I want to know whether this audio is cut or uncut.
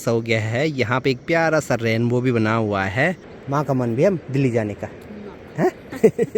cut